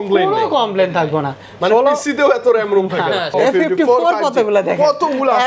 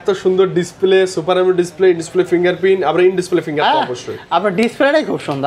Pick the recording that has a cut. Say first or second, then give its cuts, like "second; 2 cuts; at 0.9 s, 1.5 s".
first; 1 cut; at 3.3 s